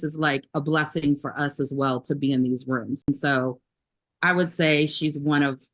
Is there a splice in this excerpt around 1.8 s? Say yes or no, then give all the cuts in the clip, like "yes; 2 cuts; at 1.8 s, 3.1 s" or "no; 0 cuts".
no; 1 cut; at 3.1 s